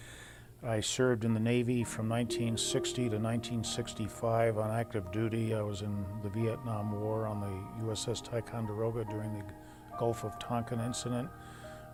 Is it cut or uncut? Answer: uncut